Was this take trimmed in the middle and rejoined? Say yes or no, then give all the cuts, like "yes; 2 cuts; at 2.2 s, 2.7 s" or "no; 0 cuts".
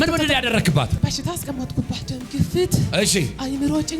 yes; 2 cuts; at 1.0 s, 2.0 s